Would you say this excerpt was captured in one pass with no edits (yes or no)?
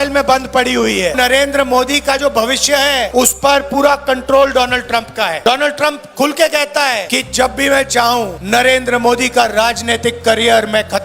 no